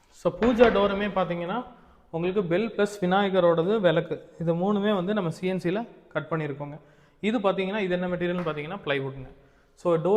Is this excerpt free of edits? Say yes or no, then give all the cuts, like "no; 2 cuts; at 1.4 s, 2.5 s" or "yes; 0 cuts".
yes; 0 cuts